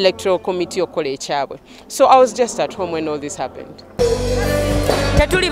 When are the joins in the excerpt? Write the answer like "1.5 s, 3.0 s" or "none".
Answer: 3.9 s